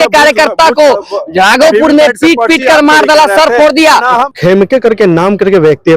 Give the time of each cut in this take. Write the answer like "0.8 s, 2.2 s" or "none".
4.3 s